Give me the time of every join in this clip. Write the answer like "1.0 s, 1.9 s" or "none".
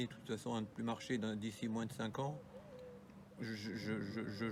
none